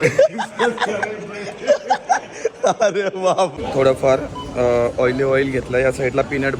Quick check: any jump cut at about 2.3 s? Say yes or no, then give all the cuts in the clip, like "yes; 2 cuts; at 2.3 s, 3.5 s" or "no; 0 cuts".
yes; 2 cuts; at 2.3 s, 3.6 s